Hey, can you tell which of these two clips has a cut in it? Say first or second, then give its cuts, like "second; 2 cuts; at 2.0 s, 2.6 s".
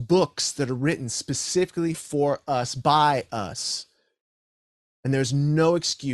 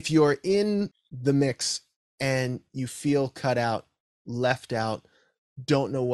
second; 1 cut; at 1.1 s